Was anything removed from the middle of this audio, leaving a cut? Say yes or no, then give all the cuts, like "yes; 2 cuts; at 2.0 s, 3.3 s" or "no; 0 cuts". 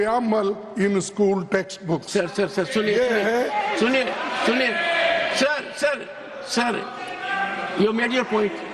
no; 0 cuts